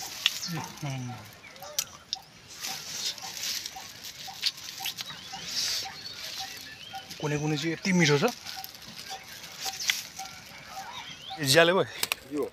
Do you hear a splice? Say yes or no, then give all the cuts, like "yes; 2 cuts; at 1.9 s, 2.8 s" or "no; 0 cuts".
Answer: yes; 1 cut; at 11.4 s